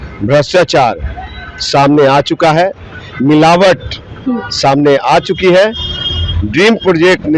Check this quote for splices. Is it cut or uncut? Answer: uncut